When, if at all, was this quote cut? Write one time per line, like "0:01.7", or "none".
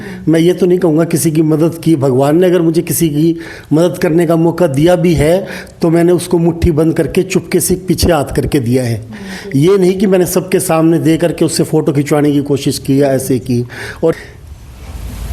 0:14.1